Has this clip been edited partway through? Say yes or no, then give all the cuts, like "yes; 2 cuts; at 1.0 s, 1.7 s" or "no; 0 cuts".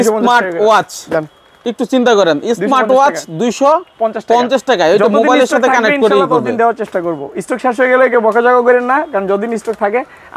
no; 0 cuts